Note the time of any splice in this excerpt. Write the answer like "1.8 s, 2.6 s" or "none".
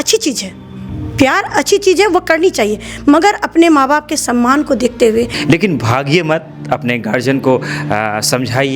5.3 s